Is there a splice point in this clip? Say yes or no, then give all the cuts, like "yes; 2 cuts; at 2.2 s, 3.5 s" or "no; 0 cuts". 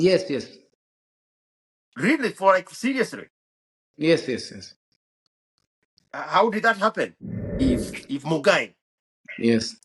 yes; 1 cut; at 7.6 s